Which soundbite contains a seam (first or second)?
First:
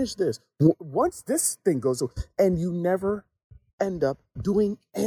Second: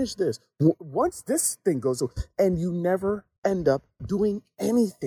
second